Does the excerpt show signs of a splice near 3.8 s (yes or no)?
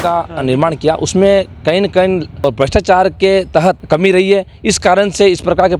yes